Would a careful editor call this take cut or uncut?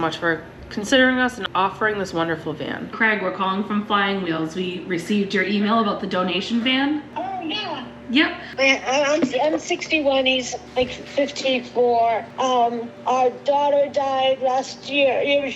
cut